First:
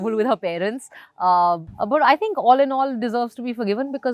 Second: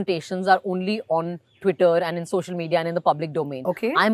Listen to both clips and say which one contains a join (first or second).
first